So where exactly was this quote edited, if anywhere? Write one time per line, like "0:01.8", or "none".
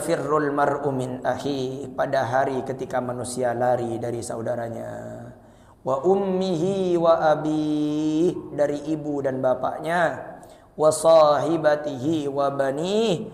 none